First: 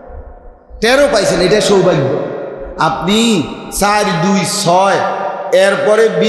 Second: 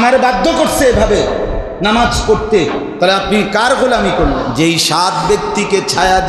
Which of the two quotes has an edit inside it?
second; 1 cut; at 4.5 s

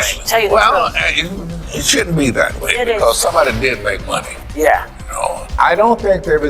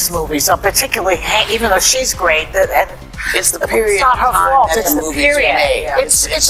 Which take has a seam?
first; 1 cut; at 5.5 s

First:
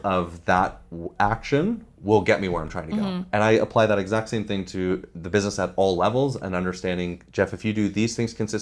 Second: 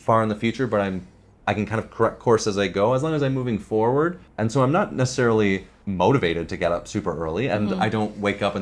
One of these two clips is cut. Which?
second; 2 cuts; at 4.3 s, 5.8 s

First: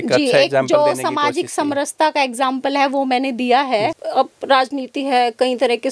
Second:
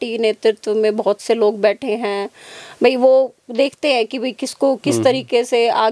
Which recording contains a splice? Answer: first; 1 cut; at 4.0 s

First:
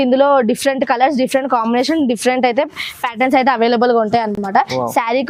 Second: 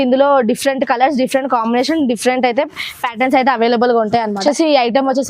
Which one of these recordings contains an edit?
second; 1 cut; at 4.4 s

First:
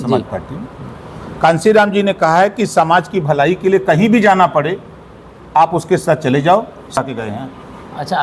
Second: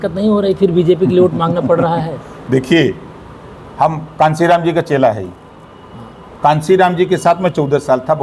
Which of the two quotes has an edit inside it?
first; 1 cut; at 7.0 s

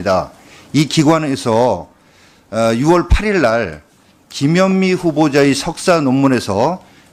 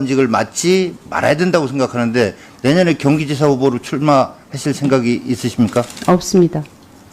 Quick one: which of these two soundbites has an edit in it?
second; 1 cut; at 5.2 s

